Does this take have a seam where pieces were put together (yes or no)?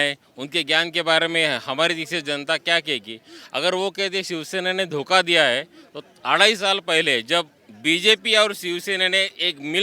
no